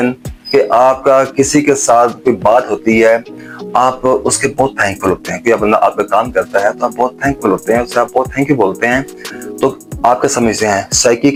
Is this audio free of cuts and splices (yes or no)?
yes